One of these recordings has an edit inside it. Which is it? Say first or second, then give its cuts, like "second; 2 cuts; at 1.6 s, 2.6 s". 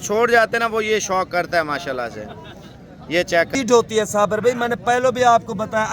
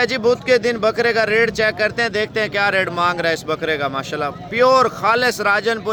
first; 1 cut; at 3.5 s